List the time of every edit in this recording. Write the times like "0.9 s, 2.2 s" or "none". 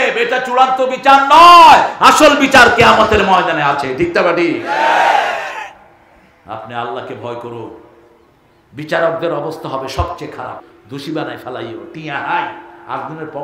10.6 s